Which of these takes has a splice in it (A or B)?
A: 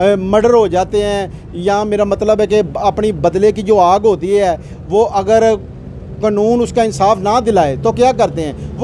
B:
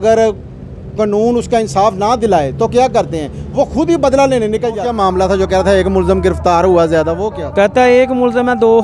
B